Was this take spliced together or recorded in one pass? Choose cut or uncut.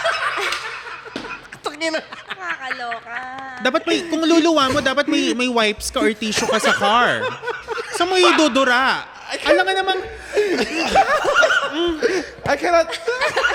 uncut